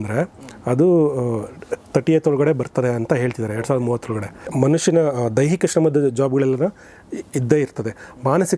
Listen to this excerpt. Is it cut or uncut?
cut